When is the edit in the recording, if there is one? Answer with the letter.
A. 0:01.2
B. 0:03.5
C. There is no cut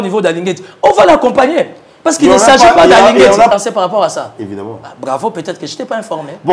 B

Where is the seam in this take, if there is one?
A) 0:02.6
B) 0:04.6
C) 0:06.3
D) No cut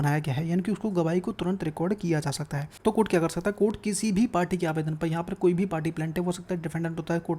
A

